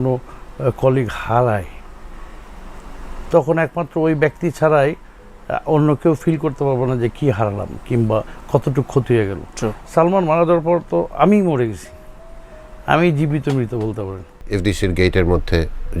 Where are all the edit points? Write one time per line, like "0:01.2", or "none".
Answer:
0:14.3

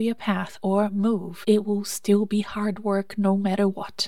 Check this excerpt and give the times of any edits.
0:01.3

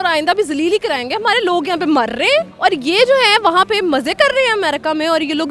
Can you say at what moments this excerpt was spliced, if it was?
none

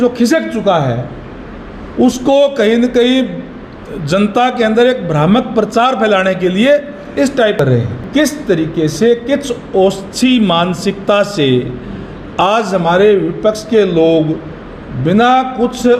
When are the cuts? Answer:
0:08.1

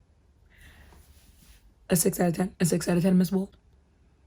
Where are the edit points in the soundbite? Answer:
none

